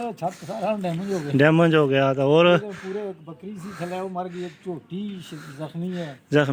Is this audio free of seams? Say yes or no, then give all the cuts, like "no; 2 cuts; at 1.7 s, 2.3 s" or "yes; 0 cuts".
yes; 0 cuts